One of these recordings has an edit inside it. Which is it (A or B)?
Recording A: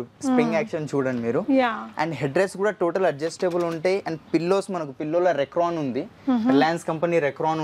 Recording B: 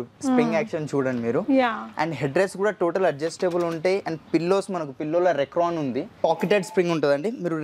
B